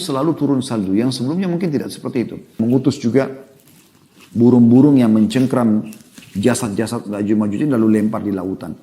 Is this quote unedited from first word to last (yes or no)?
no